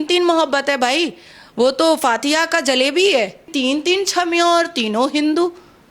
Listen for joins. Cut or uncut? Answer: cut